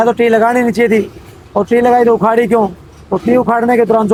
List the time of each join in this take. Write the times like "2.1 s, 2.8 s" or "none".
none